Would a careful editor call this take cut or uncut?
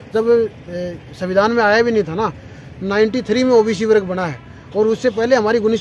uncut